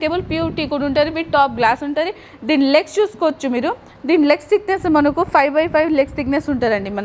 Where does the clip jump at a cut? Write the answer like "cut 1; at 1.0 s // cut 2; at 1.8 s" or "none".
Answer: none